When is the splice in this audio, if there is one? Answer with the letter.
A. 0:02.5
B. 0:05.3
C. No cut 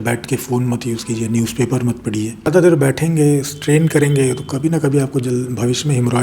A